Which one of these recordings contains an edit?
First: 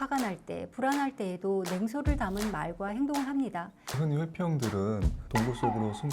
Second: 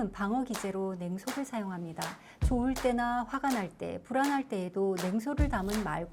first; 1 cut; at 3.8 s

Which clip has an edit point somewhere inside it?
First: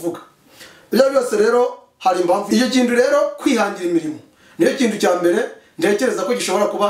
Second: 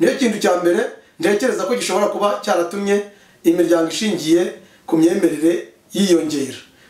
first; 1 cut; at 2.4 s

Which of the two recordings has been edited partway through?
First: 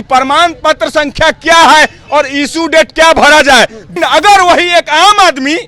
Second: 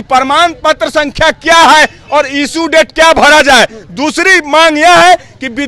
first; 1 cut; at 3.9 s

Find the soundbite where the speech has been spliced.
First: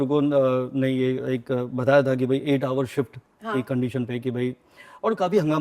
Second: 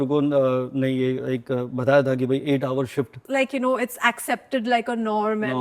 second; 1 cut; at 3.2 s

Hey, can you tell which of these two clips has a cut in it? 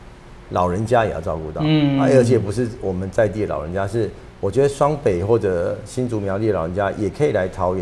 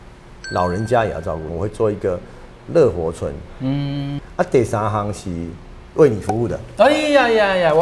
second; 2 cuts; at 1.5 s, 4.2 s

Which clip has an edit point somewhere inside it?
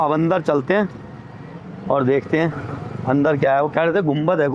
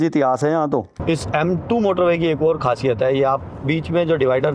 second; 1 cut; at 0.9 s

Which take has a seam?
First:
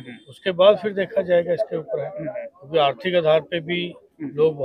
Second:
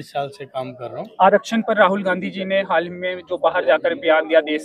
second; 1 cut; at 1.1 s

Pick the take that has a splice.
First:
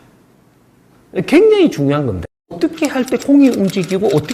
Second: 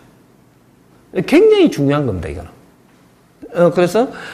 first; 1 cut; at 2.6 s

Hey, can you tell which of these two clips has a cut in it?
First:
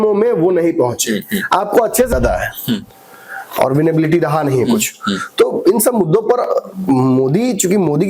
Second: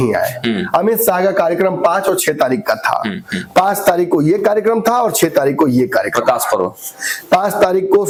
first; 1 cut; at 2.1 s

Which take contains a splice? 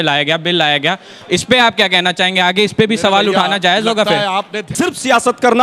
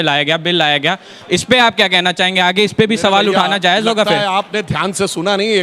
first; 1 cut; at 4.6 s

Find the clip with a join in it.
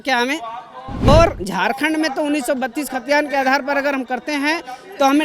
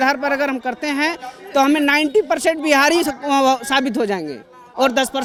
first; 1 cut; at 1.1 s

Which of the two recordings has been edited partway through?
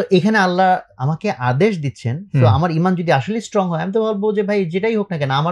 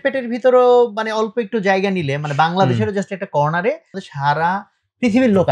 second; 1 cut; at 4.0 s

